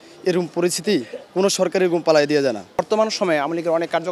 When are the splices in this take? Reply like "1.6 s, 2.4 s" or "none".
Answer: 2.8 s